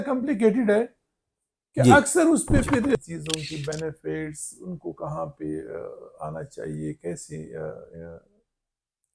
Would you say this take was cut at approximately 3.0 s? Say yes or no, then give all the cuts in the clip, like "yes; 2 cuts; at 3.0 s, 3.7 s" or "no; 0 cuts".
yes; 1 cut; at 3.0 s